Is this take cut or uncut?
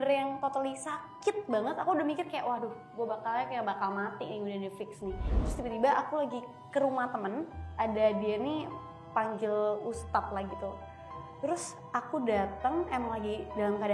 cut